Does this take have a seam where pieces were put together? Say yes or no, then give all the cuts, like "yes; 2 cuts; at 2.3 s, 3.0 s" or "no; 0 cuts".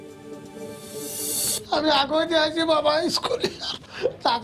yes; 1 cut; at 1.4 s